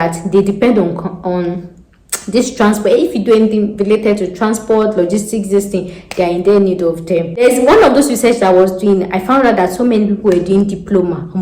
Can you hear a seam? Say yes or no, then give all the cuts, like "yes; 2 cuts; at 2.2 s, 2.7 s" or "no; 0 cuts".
yes; 1 cut; at 7.4 s